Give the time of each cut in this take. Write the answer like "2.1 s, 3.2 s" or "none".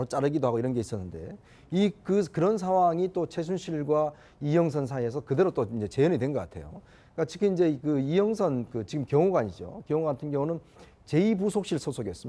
8.9 s